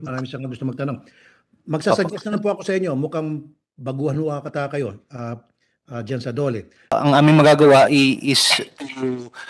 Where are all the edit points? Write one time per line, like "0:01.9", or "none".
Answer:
0:06.9

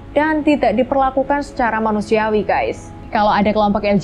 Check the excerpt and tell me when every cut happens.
0:03.0

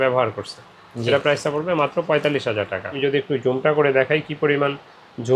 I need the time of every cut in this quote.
0:02.9

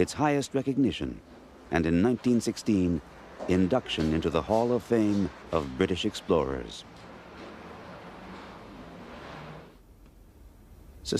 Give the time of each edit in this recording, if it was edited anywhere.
0:03.9

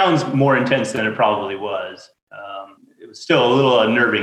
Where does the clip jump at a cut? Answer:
0:02.1
0:02.8

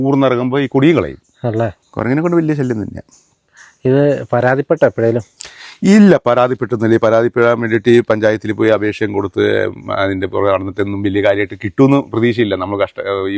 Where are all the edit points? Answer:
0:01.8

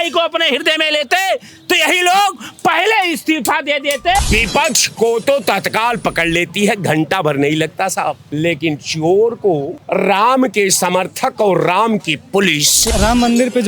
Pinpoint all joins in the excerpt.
0:04.2
0:08.2
0:09.8
0:12.9

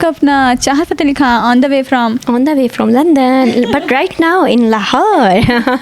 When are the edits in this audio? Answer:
none

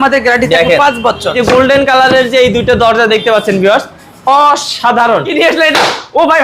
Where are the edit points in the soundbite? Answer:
0:01.4
0:05.3

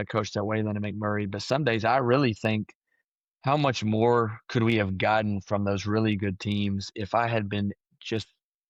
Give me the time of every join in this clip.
none

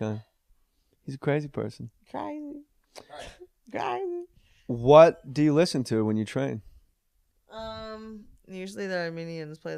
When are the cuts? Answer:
0:02.2

